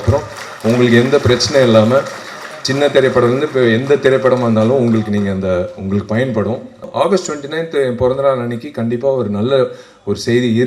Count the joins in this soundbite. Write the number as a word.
one